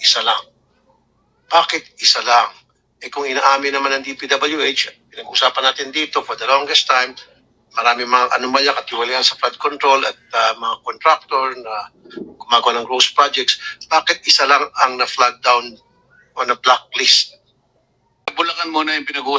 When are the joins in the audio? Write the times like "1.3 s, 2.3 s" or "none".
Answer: 18.2 s